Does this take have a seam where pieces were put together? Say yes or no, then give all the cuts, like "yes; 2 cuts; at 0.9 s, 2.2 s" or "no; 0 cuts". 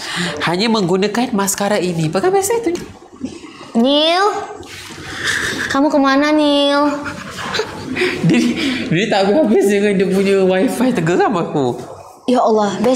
yes; 1 cut; at 2.8 s